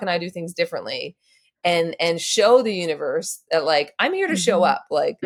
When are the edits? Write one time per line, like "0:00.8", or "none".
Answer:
none

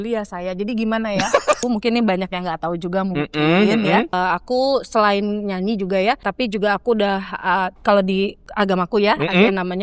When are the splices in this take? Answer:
0:01.6
0:04.1
0:06.3
0:08.4

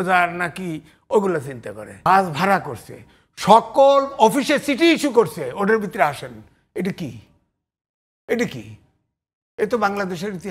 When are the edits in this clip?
0:02.1

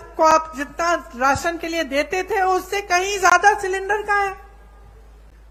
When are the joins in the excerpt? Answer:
none

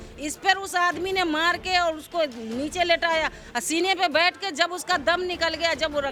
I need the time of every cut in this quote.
none

